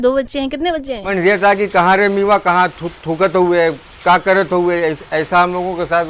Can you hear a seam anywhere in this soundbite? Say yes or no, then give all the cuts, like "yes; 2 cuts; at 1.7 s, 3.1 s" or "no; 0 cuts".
yes; 1 cut; at 1.1 s